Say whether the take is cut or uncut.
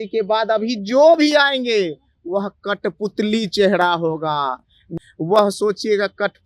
cut